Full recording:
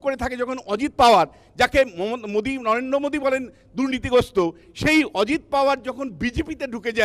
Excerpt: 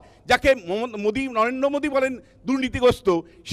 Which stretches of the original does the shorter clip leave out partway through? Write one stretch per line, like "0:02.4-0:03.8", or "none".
none